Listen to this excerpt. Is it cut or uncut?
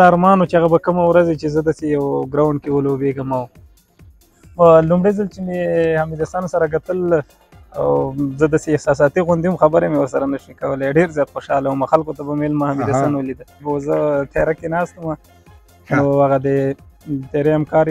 cut